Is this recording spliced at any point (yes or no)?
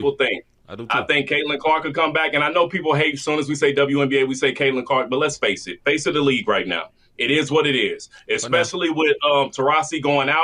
no